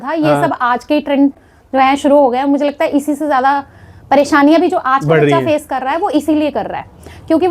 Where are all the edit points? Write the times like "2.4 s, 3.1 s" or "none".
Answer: none